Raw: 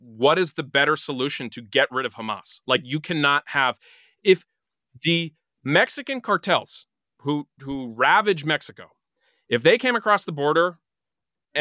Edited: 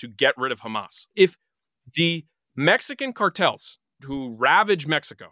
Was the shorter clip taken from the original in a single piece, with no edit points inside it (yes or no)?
no